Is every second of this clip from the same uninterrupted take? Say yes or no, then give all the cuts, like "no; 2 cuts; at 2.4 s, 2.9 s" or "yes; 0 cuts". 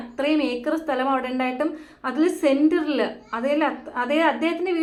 yes; 0 cuts